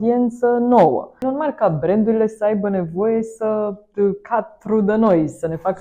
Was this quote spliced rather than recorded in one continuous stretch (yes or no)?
yes